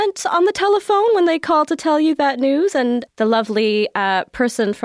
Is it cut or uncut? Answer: cut